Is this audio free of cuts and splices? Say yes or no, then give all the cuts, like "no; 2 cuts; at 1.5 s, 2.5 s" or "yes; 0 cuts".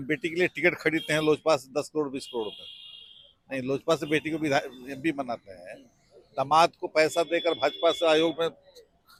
yes; 0 cuts